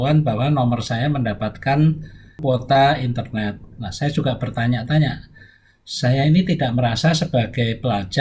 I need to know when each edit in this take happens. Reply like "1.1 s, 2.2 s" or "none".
2.4 s